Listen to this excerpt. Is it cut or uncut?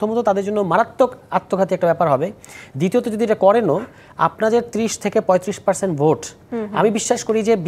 uncut